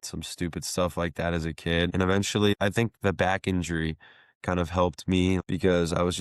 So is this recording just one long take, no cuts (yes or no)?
yes